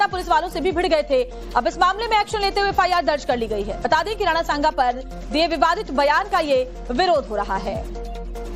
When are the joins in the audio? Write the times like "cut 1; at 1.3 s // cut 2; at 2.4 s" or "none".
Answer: none